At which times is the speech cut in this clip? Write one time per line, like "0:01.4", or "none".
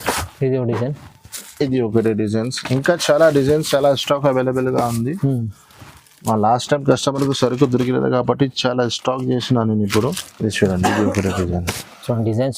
none

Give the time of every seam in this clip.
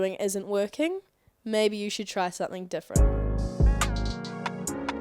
0:02.9

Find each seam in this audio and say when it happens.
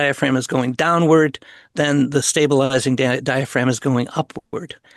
none

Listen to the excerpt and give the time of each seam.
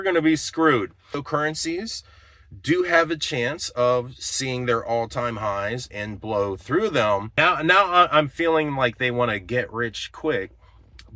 0:01.2
0:07.3

